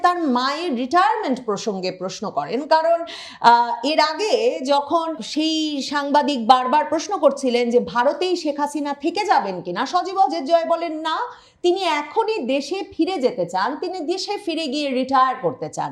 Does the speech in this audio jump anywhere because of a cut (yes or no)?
yes